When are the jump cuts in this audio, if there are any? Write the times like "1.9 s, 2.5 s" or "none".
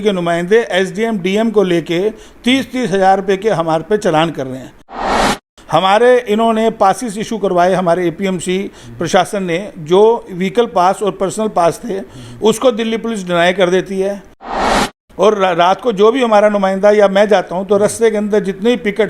5.0 s, 14.5 s